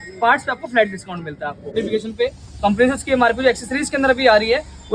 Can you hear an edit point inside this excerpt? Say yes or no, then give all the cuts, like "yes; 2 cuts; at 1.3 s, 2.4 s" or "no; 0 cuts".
yes; 1 cut; at 1.7 s